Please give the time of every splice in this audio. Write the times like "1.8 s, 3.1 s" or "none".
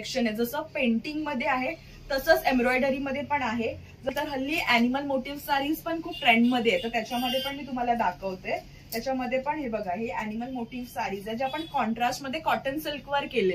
4.1 s